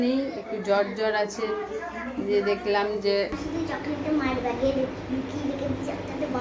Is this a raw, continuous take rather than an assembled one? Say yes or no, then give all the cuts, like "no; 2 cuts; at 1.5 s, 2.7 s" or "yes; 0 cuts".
no; 1 cut; at 3.3 s